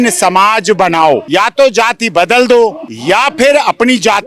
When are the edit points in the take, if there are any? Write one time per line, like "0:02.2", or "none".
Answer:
0:01.2
0:02.9

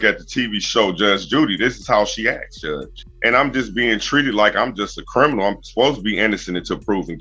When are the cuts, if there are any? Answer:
0:02.9

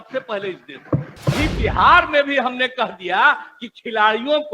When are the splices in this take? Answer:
0:01.3

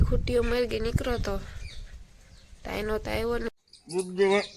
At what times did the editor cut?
0:03.5

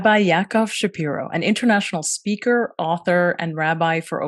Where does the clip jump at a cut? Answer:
none

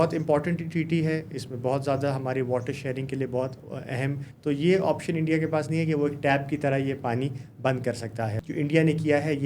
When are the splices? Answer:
0:04.3
0:08.4

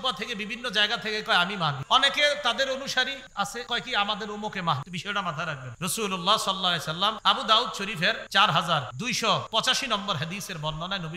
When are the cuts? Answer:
0:01.8
0:03.4
0:05.3
0:07.2
0:08.2
0:09.4

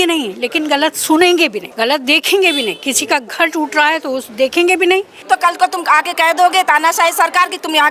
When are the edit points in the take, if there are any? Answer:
0:01.6
0:05.1

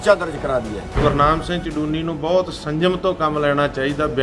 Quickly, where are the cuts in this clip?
0:01.0

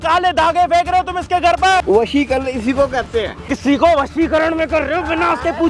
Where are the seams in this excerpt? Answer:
0:01.8
0:03.5

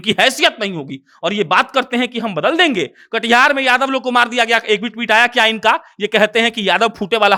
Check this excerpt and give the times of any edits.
none

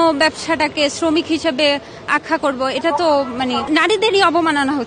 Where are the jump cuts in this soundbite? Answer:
0:03.6

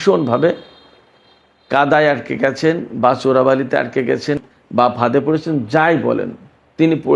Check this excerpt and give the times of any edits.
0:04.4

